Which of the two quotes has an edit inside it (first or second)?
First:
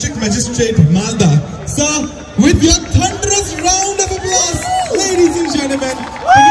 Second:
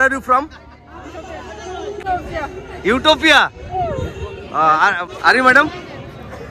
second